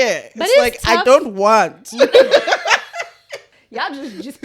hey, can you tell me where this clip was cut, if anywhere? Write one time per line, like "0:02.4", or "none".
0:03.5